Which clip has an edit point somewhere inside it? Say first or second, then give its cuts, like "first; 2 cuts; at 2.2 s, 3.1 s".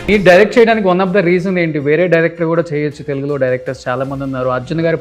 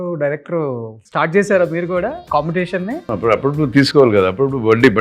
second; 3 cuts; at 0.9 s, 2.2 s, 3.1 s